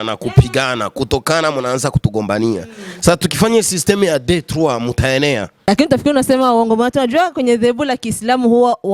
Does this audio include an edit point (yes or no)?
yes